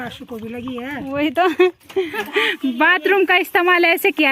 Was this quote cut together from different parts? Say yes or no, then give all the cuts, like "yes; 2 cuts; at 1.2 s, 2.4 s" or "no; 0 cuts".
yes; 1 cut; at 2.3 s